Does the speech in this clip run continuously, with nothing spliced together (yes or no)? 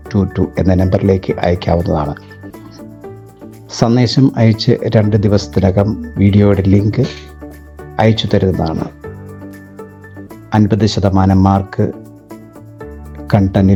yes